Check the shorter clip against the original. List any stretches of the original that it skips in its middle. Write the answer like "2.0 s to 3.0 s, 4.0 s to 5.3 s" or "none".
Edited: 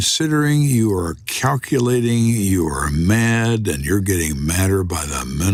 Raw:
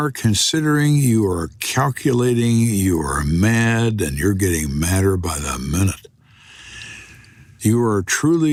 none